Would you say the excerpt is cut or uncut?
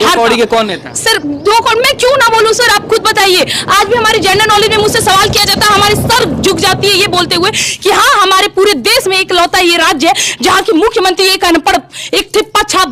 uncut